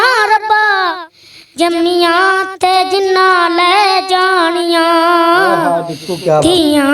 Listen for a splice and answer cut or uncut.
uncut